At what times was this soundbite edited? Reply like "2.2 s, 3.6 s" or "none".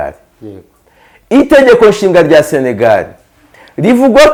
none

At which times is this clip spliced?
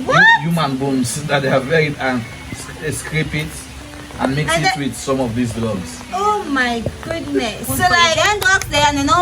8.2 s

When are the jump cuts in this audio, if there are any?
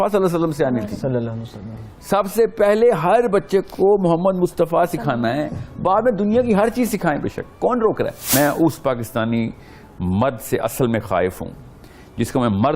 8.3 s

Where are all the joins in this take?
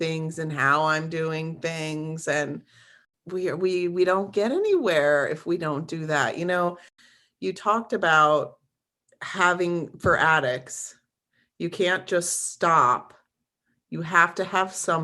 6.9 s

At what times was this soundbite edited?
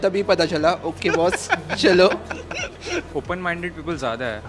3.1 s

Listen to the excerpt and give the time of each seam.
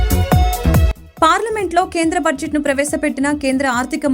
none

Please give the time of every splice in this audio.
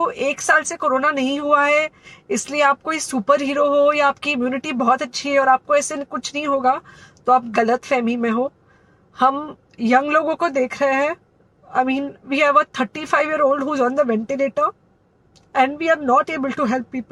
none

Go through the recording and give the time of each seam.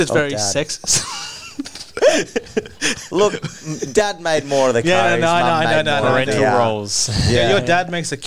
none

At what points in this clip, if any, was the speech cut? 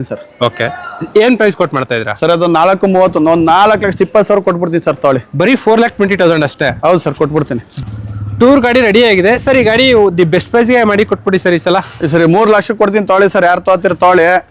7.6 s

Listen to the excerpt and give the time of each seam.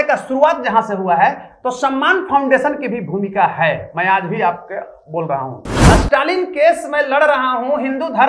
5.7 s

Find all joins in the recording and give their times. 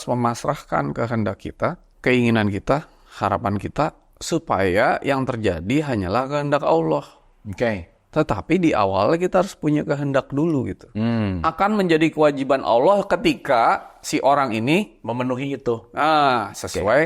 1.9 s, 11.4 s

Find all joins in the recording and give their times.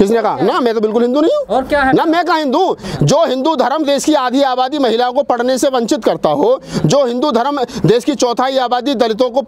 2.8 s

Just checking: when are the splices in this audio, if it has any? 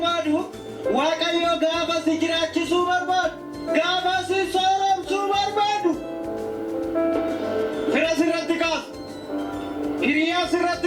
none

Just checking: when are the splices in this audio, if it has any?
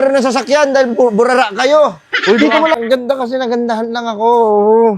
2.8 s

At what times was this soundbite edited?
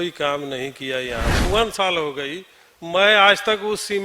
1.5 s

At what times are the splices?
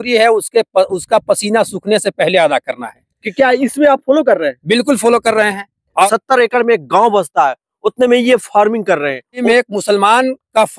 6.1 s, 9.4 s

